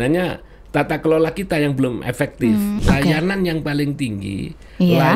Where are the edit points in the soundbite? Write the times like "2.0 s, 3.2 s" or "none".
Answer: 2.8 s